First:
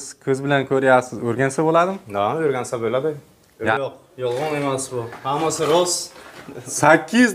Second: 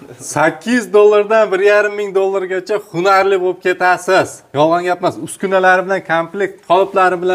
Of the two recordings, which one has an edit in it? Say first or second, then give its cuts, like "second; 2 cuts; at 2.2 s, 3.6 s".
first; 1 cut; at 3.7 s